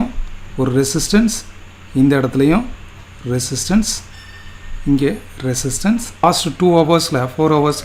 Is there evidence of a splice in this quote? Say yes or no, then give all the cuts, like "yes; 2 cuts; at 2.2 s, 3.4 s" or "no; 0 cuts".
yes; 1 cut; at 6.2 s